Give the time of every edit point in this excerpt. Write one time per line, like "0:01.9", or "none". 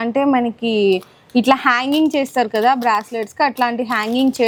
none